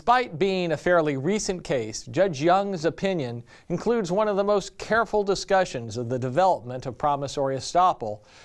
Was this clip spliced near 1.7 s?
no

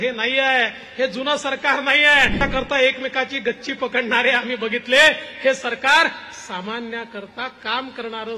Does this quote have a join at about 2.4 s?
yes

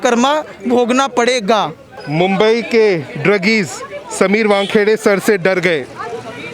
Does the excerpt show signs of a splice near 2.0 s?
yes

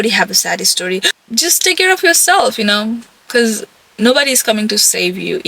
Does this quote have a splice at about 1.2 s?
yes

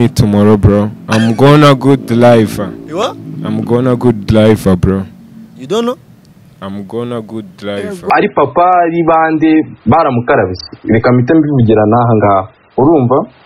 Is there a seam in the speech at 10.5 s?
no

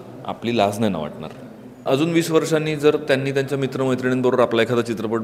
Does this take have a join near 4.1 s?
no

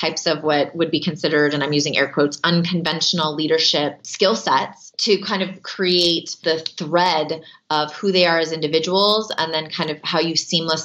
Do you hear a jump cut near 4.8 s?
yes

